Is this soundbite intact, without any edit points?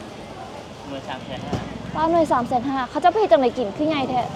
yes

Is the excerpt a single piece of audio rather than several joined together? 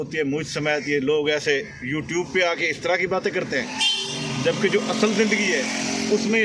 yes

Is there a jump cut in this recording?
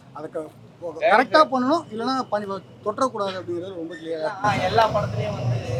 no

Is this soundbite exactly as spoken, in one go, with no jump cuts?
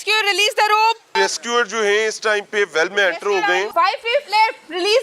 no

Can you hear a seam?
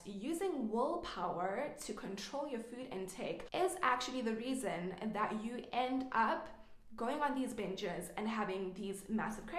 yes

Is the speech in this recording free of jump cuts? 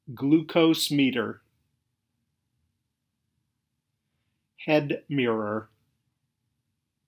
yes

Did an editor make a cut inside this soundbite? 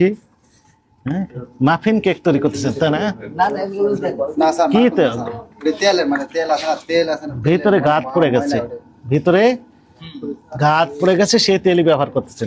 no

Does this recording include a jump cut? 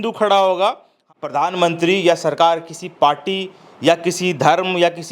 yes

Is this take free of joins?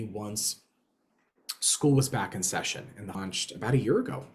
no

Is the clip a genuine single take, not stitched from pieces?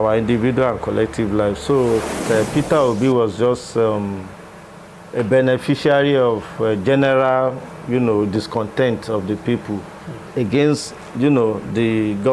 no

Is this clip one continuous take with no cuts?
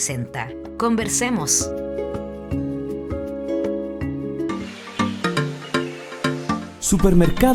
yes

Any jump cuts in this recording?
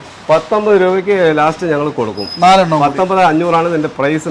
no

